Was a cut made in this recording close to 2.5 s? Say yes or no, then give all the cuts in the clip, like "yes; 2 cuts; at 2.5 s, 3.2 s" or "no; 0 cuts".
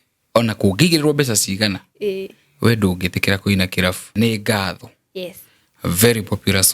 no; 1 cut; at 4.1 s